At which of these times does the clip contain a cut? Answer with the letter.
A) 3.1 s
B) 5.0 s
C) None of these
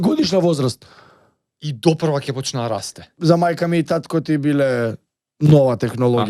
A